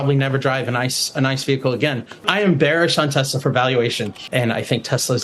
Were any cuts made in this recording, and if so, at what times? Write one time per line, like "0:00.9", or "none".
0:02.2
0:04.2